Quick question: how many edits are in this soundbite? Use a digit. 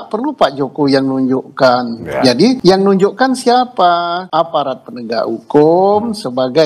2